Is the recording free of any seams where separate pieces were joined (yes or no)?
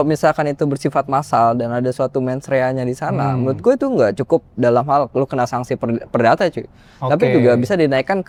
yes